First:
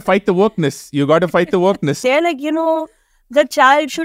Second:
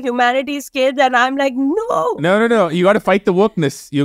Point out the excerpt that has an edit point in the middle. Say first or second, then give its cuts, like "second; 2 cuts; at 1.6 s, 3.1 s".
first; 1 cut; at 2.0 s